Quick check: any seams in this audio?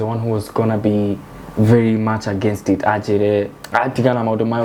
no; 0 cuts

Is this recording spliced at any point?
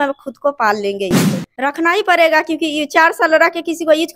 yes; 1 cut; at 1.5 s

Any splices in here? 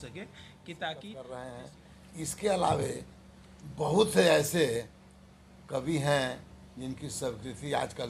yes; 1 cut; at 1.3 s

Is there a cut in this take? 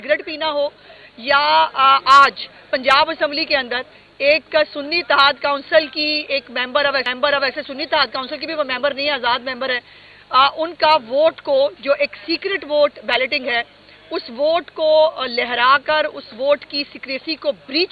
no; 0 cuts

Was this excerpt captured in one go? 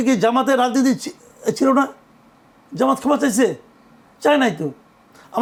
yes; 0 cuts

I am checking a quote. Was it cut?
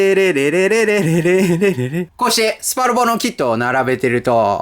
yes; 1 cut; at 2.0 s

